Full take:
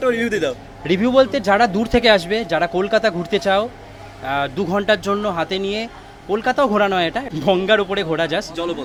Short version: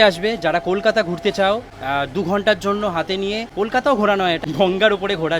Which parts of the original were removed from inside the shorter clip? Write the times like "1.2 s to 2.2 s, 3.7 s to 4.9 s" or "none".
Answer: 3.8 s to 4.2 s, 5.9 s to 6.2 s, 7.2 s to 7.3 s